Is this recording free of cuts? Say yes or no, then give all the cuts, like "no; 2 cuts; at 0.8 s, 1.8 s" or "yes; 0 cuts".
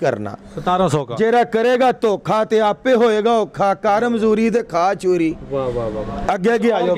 yes; 0 cuts